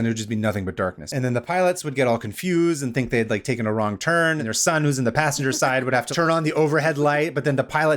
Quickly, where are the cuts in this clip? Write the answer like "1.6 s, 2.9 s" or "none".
1.0 s, 4.4 s, 6.1 s